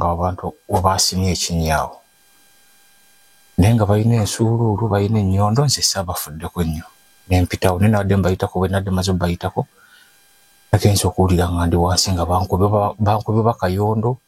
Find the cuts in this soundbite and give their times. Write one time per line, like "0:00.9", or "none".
none